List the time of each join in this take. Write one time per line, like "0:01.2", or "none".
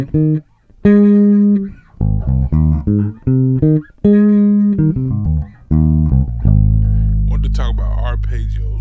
none